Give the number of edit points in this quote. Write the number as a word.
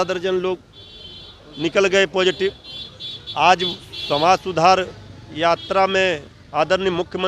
zero